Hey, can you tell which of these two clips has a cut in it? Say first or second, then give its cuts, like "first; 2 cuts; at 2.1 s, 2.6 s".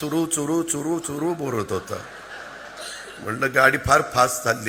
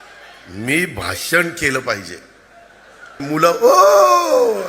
second; 1 cut; at 3.2 s